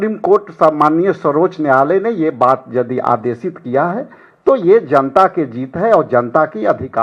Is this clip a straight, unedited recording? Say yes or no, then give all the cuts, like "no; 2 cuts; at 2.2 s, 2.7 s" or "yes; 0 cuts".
yes; 0 cuts